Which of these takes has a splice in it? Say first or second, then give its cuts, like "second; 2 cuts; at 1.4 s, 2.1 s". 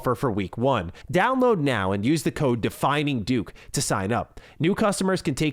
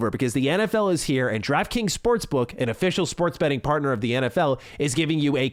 first; 1 cut; at 0.9 s